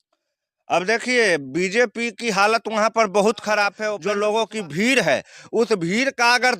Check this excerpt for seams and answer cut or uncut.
cut